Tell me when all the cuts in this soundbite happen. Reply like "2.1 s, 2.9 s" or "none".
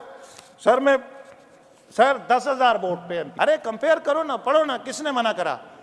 3.3 s